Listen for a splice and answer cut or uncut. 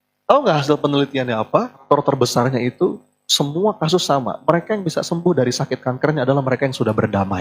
cut